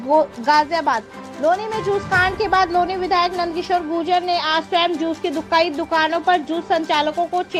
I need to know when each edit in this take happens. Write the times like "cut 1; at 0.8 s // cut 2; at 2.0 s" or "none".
none

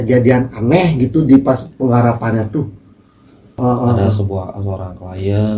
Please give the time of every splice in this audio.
cut 1; at 3.6 s

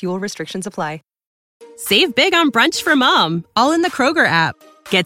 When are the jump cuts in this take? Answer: cut 1; at 1.3 s

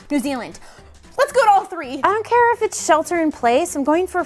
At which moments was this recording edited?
cut 1; at 1.8 s

